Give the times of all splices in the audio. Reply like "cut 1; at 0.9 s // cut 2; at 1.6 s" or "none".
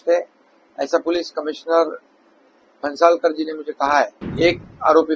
cut 1; at 4.2 s